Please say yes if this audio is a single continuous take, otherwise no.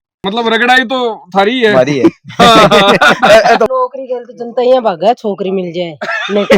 no